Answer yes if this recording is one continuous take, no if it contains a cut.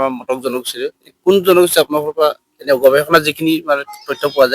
yes